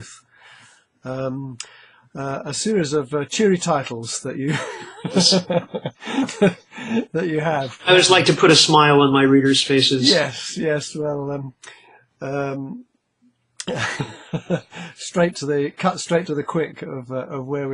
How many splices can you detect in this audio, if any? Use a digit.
0